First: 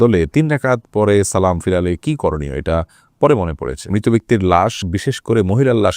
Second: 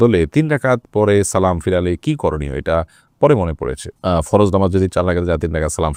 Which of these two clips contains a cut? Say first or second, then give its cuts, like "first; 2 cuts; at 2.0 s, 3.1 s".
first; 1 cut; at 3.9 s